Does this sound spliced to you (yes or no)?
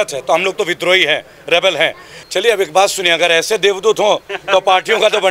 yes